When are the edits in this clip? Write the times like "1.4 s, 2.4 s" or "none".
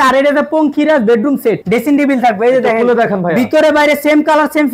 1.6 s